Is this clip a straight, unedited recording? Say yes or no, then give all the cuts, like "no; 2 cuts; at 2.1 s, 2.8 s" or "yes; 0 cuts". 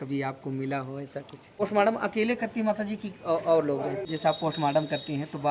no; 2 cuts; at 1.6 s, 4.1 s